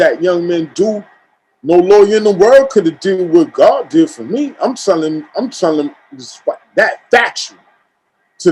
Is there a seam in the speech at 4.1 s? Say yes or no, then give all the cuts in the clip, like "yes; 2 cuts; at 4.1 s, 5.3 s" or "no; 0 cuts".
no; 0 cuts